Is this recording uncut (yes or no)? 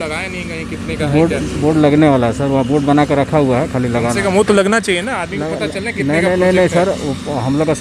yes